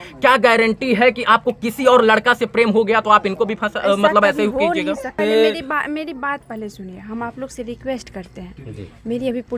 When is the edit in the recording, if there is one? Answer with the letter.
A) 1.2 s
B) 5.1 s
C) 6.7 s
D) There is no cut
B